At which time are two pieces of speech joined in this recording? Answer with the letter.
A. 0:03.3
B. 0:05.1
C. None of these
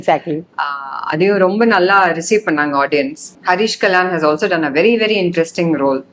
A